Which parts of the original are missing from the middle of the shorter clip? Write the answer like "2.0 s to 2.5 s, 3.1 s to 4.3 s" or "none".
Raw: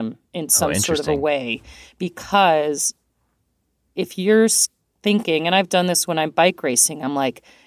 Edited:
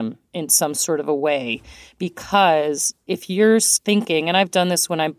2.9 s to 3.8 s, 4.6 s to 4.9 s